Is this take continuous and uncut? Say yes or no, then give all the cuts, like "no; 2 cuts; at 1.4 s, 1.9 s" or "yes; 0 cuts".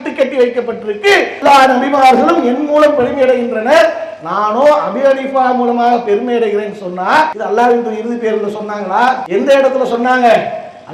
no; 3 cuts; at 1.3 s, 7.4 s, 9.2 s